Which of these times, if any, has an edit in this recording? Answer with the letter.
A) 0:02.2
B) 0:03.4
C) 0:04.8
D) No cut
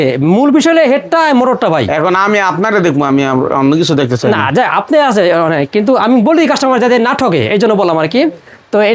D